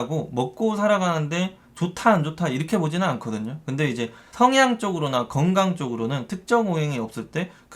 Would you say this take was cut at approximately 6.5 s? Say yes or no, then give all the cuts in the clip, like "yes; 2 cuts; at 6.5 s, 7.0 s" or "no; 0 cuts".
no; 1 cut; at 4.2 s